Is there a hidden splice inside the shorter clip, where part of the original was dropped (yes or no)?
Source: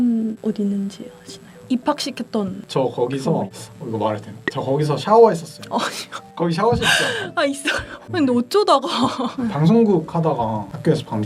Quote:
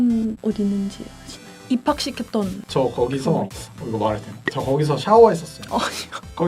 no